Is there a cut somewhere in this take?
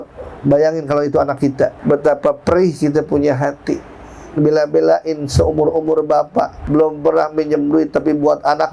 yes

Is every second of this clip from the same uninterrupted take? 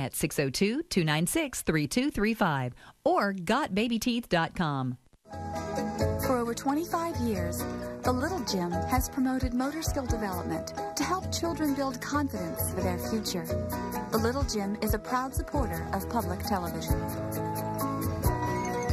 no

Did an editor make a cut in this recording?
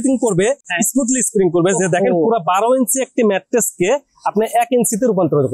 no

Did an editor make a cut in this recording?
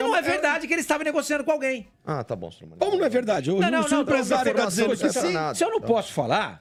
no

